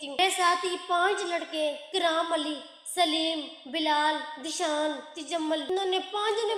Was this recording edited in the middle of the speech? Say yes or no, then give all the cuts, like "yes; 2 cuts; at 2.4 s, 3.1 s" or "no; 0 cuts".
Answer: no; 0 cuts